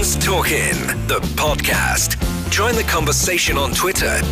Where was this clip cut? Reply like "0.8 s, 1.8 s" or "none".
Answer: none